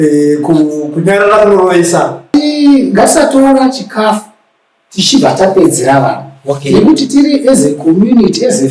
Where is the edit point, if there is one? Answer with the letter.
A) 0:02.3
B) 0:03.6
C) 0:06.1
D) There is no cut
A